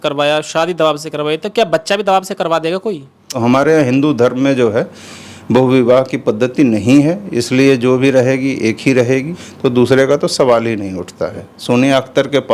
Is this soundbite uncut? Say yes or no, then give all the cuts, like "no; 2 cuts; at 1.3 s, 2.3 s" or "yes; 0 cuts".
no; 3 cuts; at 3.3 s, 9.4 s, 11.5 s